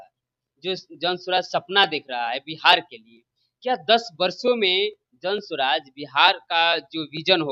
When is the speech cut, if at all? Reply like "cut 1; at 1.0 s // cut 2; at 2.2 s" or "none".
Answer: none